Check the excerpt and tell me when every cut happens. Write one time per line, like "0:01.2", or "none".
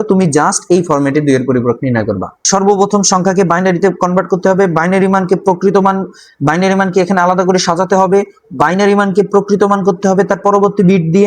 0:02.3